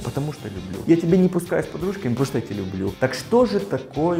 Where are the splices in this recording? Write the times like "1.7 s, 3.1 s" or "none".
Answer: 2.9 s